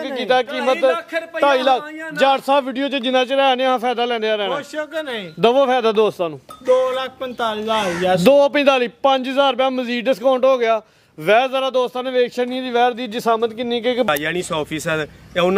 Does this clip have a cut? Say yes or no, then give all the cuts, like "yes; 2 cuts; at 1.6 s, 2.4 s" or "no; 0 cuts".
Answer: yes; 1 cut; at 14.1 s